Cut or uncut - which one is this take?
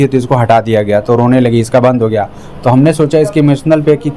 uncut